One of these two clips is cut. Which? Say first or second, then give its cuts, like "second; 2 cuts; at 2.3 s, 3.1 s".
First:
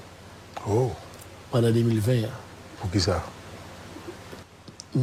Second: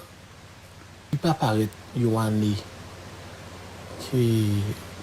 second; 1 cut; at 1.1 s